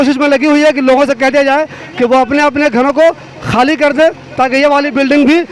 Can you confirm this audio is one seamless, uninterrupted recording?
yes; 0 cuts

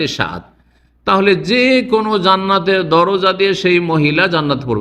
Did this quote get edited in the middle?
no; 0 cuts

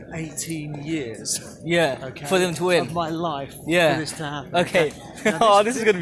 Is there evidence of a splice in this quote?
no; 0 cuts

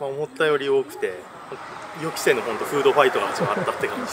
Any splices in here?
no; 0 cuts

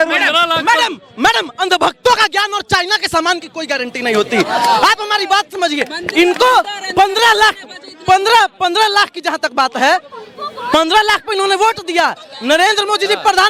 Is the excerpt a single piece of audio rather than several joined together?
yes; 0 cuts

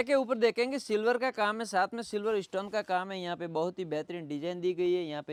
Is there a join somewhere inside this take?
no; 0 cuts

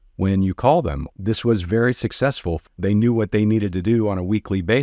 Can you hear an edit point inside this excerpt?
yes; 2 cuts; at 1.1 s, 2.5 s

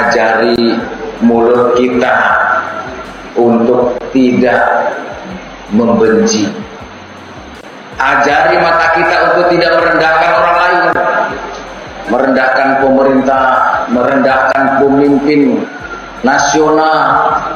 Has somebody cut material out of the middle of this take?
no; 0 cuts

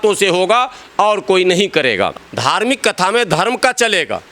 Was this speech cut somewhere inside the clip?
yes; 1 cut; at 2.2 s

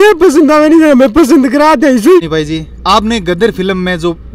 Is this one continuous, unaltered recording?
no; 1 cut; at 2.2 s

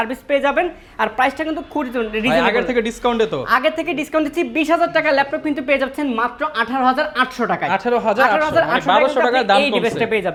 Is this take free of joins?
yes; 0 cuts

